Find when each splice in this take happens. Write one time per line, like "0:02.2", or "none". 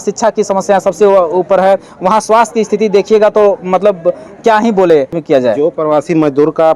0:05.2